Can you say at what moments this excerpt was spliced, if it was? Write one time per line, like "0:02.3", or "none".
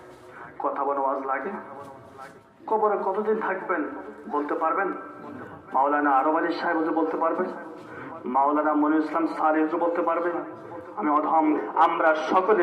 0:11.6